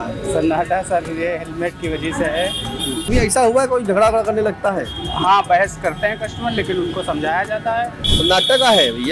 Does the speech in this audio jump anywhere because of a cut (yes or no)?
yes